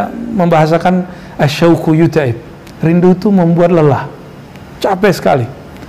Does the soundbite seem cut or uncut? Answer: uncut